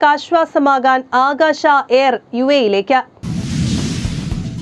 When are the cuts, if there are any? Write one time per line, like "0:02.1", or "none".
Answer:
0:03.2